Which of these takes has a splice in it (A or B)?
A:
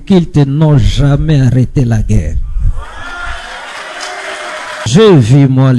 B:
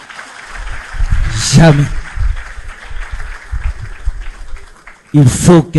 A